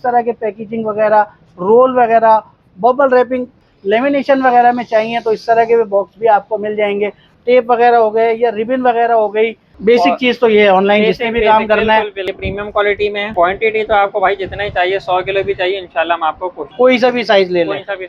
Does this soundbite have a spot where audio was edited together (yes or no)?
yes